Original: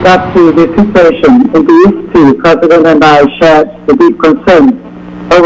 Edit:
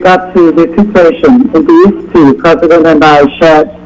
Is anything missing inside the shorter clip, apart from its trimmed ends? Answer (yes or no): no